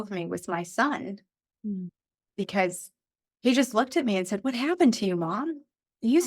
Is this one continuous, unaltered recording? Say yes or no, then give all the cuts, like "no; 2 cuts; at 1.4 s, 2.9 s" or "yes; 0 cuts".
no; 1 cut; at 3.3 s